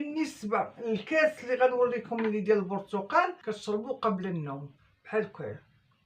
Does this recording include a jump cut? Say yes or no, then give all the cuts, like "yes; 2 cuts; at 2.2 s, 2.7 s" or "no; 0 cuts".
yes; 1 cut; at 3.5 s